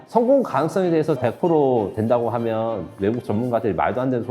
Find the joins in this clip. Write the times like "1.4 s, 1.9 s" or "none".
1.2 s